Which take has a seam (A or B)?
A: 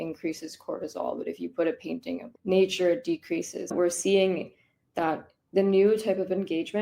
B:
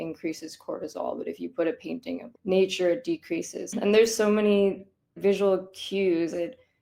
A